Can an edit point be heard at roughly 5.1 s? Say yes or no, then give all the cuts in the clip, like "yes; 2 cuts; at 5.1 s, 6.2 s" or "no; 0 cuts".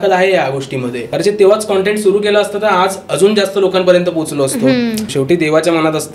yes; 2 cuts; at 1.0 s, 5.1 s